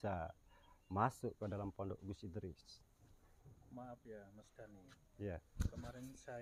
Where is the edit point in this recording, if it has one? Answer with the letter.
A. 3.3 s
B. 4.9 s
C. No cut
C